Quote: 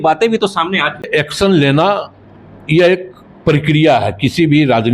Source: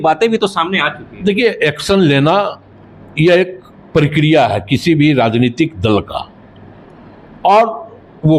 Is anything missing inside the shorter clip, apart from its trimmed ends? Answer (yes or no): yes